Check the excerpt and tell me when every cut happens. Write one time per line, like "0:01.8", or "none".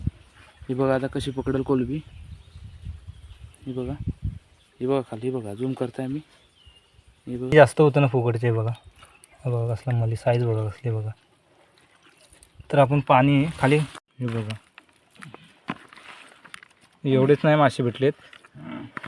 0:07.5
0:13.9